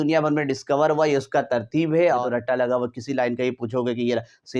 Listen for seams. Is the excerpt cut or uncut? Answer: cut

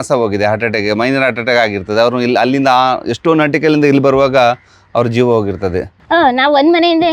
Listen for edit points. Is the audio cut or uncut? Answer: cut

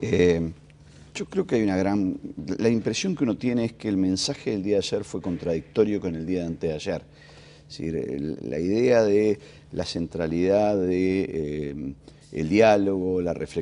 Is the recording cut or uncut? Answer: cut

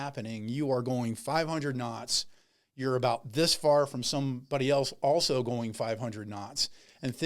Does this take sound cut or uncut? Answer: uncut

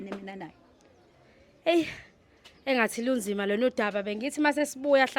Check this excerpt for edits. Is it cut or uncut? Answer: uncut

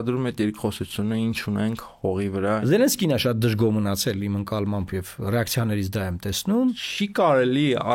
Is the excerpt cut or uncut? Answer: cut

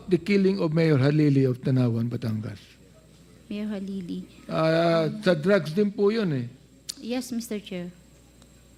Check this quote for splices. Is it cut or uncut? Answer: uncut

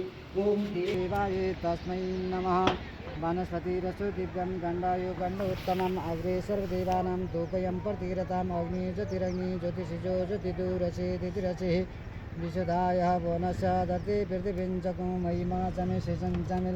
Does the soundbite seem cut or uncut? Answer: cut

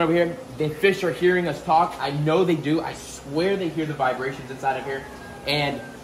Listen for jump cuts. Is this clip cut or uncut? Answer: uncut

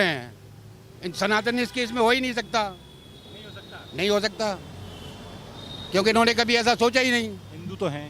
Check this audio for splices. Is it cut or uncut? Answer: uncut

